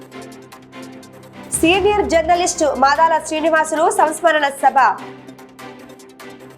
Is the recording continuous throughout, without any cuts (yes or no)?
no